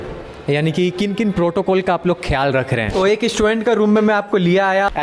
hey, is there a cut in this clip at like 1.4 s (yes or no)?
no